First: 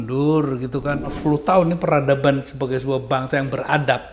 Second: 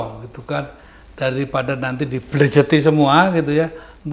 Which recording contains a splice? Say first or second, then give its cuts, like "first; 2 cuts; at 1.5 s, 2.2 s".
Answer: first; 1 cut; at 1.2 s